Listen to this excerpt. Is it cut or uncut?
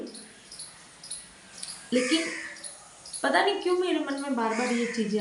uncut